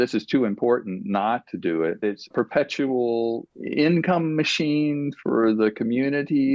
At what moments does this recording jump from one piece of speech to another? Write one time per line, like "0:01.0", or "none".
0:02.3

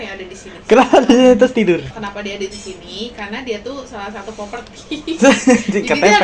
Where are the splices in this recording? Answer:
none

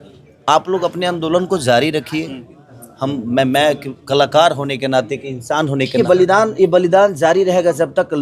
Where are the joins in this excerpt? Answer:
0:05.9

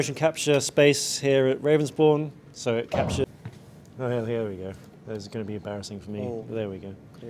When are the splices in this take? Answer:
0:03.2

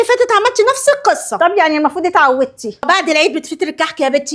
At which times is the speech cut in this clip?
0:02.8

